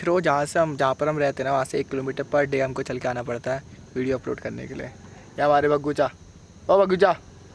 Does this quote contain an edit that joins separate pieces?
no; 0 cuts

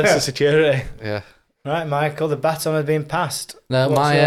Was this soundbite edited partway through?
no; 0 cuts

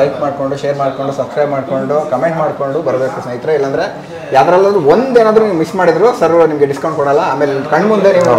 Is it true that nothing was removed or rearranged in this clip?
yes; 0 cuts

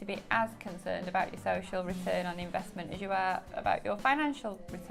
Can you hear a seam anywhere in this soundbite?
no; 0 cuts

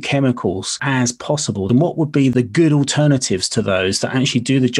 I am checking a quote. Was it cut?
yes; 2 cuts; at 1.3 s, 2.3 s

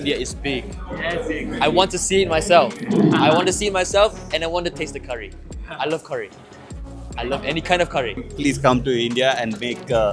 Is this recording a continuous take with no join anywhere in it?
no; 1 cut; at 8.3 s

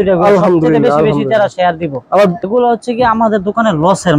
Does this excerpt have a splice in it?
yes; 1 cut; at 2.4 s

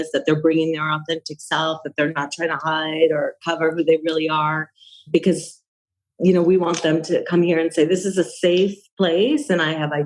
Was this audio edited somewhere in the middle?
yes; 1 cut; at 5.1 s

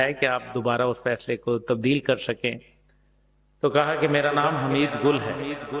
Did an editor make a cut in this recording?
no; 0 cuts

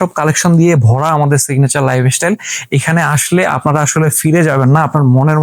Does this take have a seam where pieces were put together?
no; 0 cuts

